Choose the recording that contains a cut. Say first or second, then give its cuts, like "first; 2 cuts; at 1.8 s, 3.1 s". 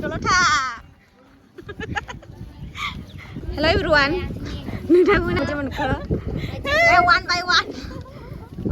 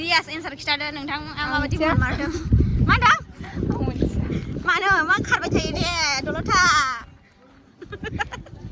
first; 2 cuts; at 3.4 s, 5.4 s